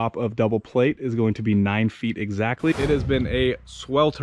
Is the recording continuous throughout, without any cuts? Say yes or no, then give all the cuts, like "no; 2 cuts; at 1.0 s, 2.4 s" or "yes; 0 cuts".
no; 1 cut; at 2.7 s